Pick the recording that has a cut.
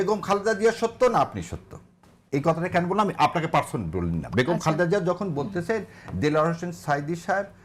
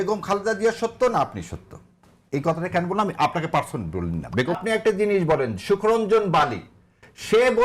second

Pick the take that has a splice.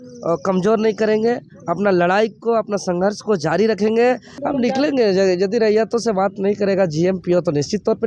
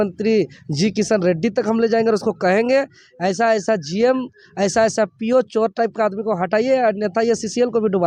first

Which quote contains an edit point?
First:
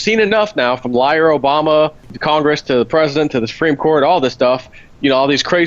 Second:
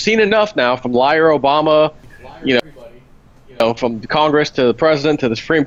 first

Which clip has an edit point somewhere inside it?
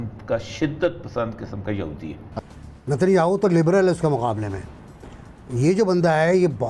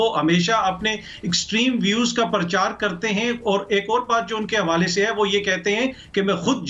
first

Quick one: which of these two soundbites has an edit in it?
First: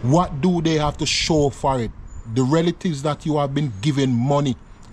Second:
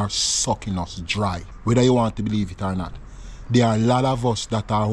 second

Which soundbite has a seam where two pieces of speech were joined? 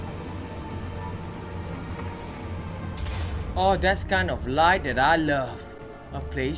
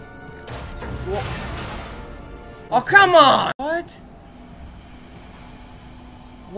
second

